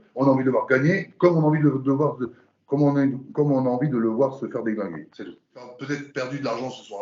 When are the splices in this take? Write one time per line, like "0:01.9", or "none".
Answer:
0:05.7